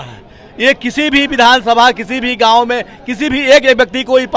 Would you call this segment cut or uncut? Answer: uncut